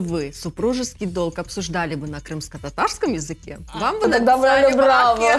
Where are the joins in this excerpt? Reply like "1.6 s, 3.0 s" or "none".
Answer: none

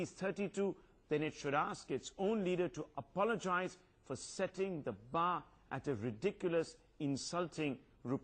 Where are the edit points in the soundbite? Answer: 6.8 s

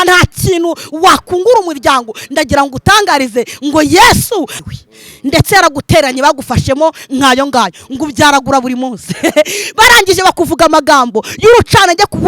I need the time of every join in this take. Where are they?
4.5 s

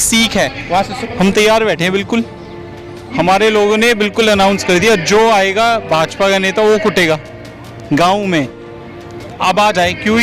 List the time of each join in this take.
1.0 s

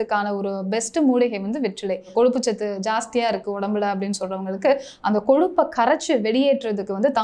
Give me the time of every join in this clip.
2.1 s

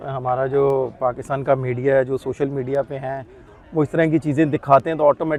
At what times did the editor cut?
none

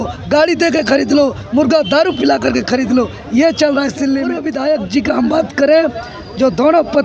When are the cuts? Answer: 4.4 s

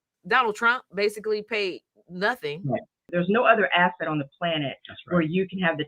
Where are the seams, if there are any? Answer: 3.0 s

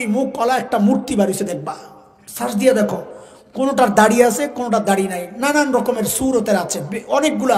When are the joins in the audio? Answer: none

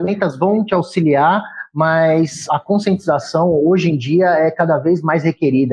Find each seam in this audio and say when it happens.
2.4 s

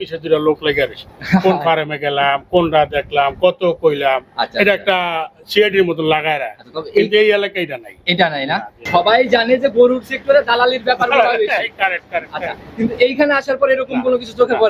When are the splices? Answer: 8.8 s

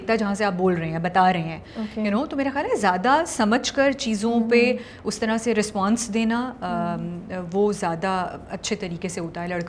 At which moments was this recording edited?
none

